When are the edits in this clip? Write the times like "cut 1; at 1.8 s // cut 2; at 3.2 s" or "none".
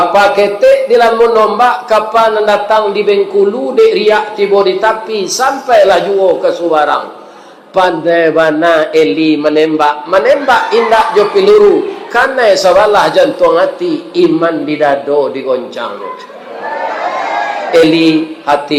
none